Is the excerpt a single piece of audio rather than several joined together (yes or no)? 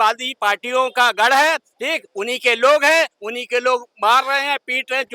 yes